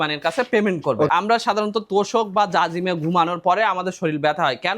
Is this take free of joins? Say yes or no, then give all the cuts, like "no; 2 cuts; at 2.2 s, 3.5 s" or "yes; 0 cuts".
no; 1 cut; at 1.1 s